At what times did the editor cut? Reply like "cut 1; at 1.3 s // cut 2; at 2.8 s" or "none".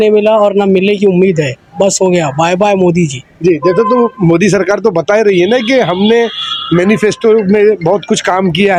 none

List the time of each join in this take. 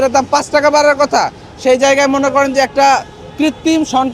none

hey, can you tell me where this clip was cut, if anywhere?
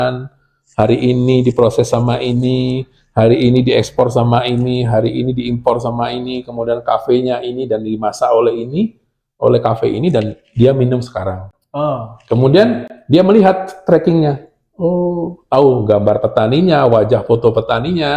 none

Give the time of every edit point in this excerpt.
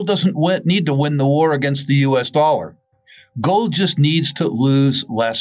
none

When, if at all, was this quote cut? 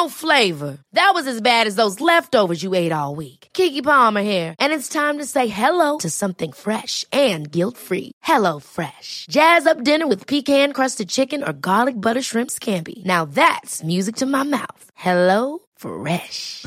none

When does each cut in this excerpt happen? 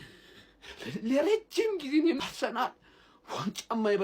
cut 1; at 2.2 s

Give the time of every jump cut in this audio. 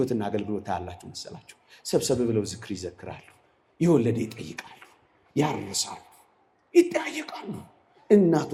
none

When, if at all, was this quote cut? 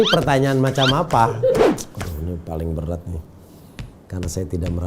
cut 1; at 1.7 s

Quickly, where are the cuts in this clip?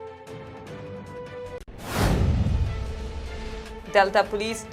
cut 1; at 3.8 s

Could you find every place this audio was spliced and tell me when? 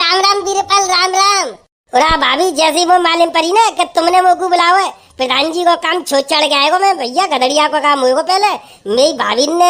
none

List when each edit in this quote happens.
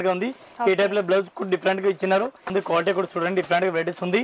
cut 1; at 2.5 s

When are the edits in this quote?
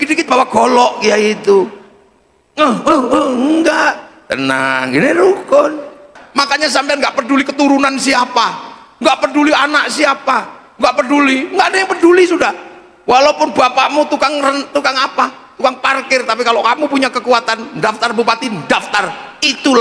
cut 1; at 6.2 s

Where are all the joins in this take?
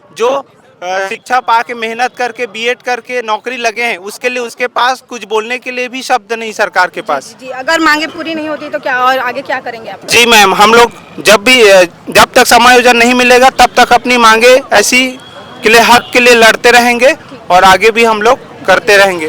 none

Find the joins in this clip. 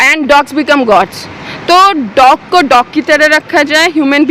none

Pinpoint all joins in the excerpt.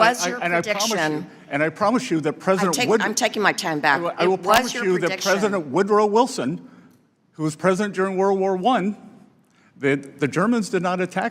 none

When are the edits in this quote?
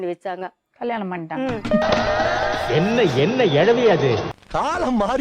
none

